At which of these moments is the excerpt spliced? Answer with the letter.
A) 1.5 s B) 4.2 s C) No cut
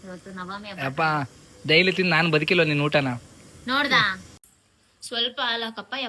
B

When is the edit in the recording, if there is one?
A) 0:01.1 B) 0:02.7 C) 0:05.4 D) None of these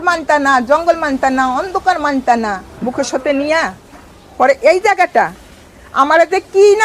B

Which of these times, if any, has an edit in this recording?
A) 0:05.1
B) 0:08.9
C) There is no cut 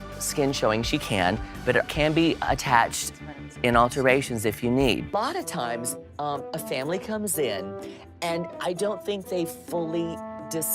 A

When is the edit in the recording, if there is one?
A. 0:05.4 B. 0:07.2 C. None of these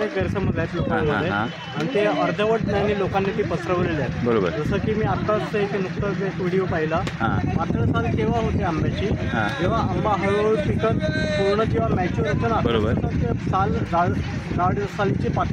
B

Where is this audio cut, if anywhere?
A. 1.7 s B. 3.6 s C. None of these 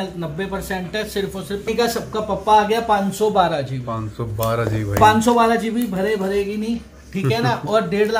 A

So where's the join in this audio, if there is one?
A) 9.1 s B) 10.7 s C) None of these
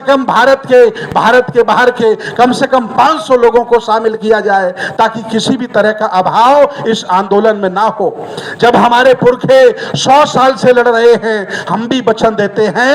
C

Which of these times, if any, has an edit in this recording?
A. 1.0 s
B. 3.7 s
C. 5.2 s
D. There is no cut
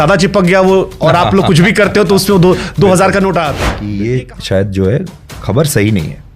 B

